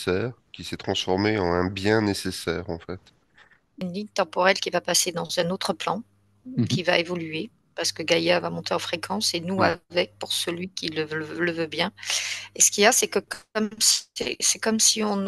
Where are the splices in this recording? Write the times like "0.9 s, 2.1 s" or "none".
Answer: 3.8 s